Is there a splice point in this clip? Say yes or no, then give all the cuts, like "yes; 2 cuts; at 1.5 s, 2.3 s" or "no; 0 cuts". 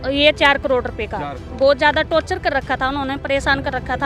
yes; 1 cut; at 1.4 s